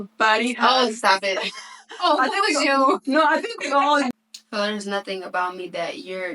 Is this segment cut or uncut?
cut